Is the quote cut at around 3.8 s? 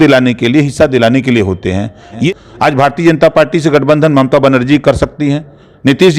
no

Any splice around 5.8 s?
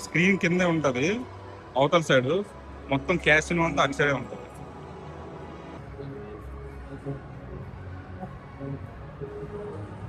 yes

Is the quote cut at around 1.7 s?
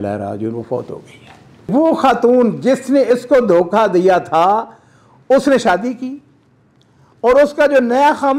yes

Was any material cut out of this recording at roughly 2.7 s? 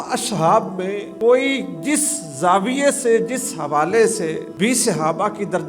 no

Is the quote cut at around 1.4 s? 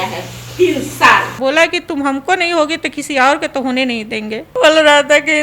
yes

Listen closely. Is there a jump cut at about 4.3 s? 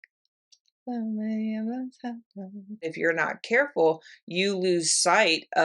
no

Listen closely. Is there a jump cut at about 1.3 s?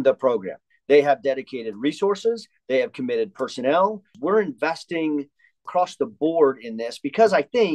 no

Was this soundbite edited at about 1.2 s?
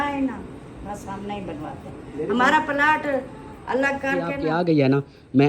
no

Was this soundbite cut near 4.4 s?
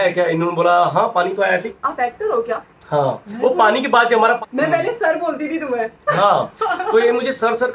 yes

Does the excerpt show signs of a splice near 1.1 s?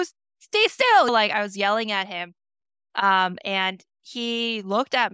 yes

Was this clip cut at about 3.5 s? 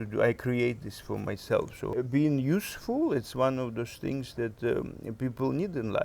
no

